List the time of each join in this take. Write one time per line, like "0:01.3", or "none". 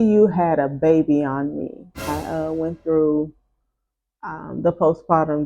0:02.1